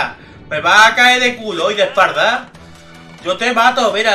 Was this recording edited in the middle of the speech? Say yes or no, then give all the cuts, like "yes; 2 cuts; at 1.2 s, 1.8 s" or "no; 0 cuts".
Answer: no; 0 cuts